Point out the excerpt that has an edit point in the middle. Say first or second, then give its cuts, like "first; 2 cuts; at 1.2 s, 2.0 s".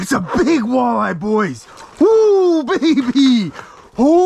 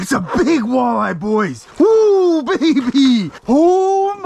second; 2 cuts; at 1.6 s, 3.3 s